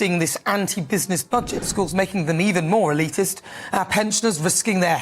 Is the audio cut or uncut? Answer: cut